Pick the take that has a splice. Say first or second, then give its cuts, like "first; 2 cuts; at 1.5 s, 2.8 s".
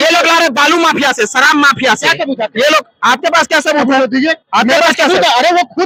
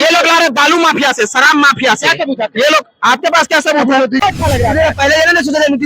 second; 1 cut; at 4.2 s